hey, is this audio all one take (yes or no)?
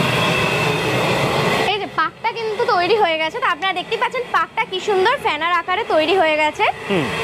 yes